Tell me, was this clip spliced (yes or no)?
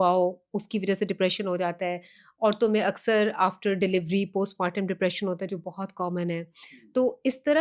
no